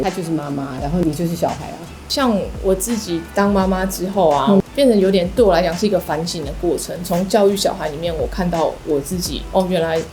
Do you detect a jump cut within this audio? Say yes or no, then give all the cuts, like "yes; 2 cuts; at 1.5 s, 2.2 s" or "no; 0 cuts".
yes; 1 cut; at 4.6 s